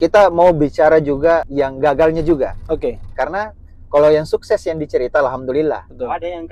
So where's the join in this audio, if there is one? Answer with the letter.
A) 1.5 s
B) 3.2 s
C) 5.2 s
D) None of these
A